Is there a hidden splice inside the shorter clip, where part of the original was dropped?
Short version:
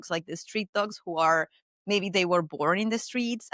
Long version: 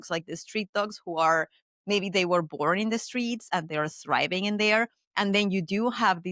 no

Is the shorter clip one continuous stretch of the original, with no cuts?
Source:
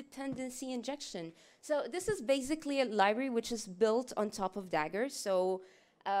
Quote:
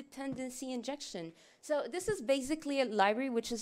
yes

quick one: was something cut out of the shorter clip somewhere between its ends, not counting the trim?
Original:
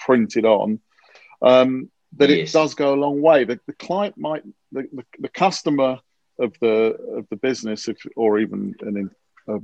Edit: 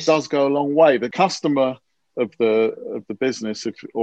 yes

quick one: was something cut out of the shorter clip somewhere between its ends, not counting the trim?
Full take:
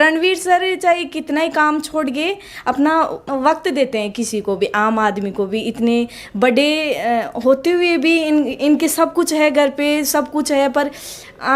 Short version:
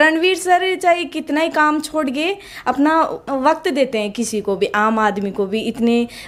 no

